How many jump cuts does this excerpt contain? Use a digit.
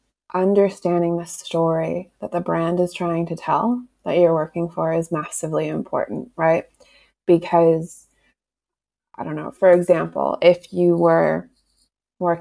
0